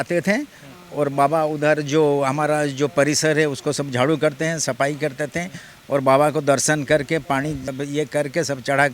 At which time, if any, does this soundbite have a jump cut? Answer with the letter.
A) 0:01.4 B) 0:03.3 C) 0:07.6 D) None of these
C